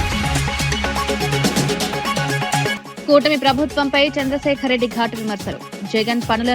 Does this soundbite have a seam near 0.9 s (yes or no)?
yes